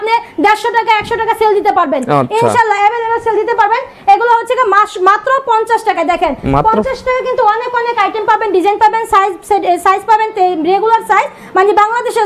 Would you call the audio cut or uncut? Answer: uncut